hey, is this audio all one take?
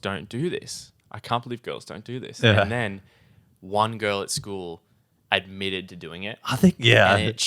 yes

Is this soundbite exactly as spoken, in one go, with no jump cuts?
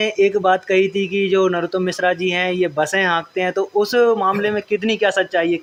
yes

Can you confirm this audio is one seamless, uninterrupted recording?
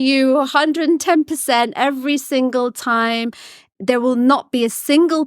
no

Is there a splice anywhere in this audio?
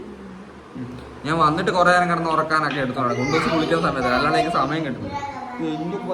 no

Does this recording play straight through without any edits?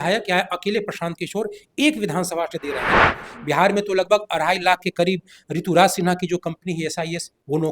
no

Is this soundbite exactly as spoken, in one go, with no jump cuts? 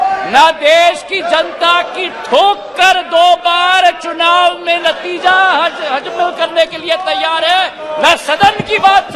yes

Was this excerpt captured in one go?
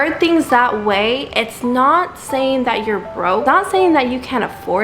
no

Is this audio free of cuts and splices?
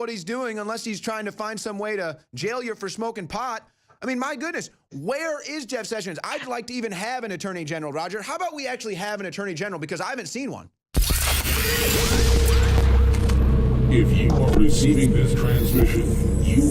no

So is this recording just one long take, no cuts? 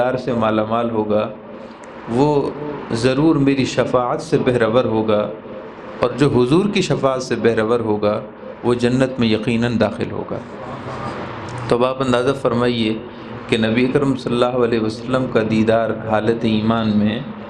yes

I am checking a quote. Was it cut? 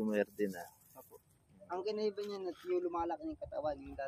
no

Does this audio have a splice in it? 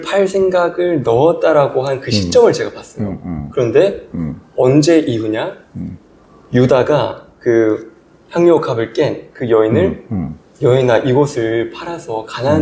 no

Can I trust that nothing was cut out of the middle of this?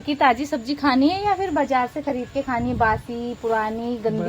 yes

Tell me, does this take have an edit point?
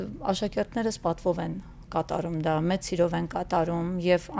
no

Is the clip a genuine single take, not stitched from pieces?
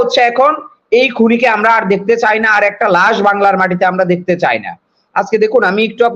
yes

